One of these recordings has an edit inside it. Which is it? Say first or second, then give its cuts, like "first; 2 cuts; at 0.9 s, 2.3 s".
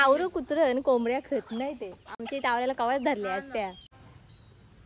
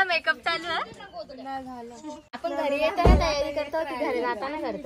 first; 1 cut; at 4.0 s